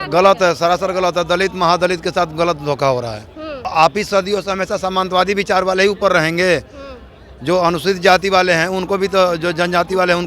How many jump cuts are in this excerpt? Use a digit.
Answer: 1